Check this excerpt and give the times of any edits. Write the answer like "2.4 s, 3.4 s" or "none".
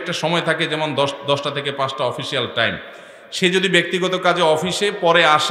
none